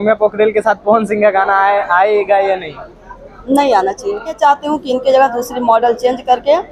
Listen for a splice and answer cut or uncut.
cut